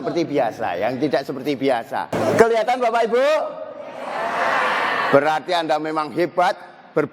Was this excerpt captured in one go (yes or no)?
no